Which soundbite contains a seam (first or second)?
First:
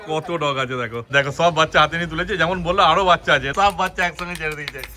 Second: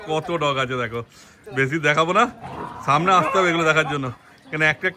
first